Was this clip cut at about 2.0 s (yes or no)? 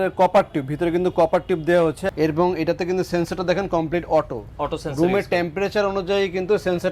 yes